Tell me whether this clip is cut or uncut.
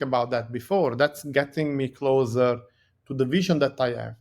uncut